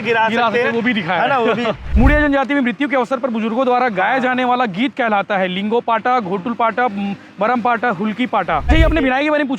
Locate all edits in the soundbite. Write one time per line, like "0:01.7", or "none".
0:01.9
0:08.7